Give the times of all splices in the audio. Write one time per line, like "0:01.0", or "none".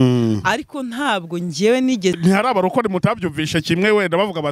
0:02.2

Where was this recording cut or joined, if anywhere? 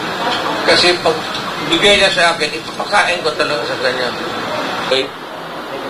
0:04.9

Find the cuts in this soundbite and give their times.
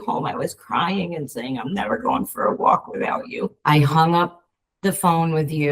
0:03.6

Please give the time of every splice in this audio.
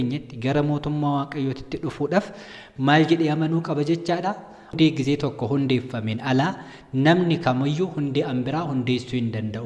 0:04.7

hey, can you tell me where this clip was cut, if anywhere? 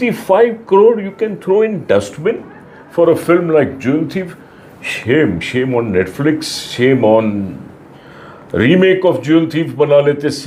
none

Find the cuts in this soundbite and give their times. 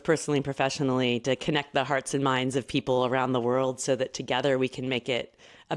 none

